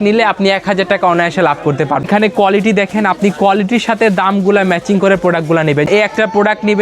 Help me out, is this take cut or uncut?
cut